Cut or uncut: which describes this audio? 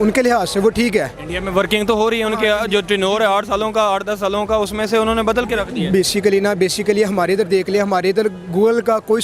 uncut